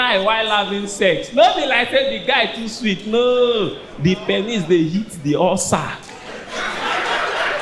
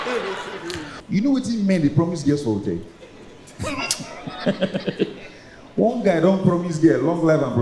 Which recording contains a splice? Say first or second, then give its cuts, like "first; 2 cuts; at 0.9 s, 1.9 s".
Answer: second; 1 cut; at 0.9 s